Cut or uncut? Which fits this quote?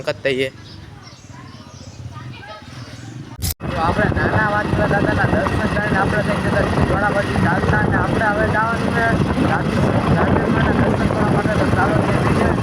cut